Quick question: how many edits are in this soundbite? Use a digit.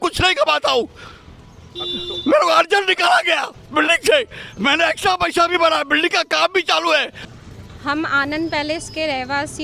1